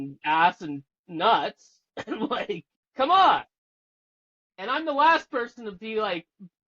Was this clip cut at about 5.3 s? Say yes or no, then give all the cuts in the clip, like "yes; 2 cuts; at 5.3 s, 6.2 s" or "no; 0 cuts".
no; 1 cut; at 2.8 s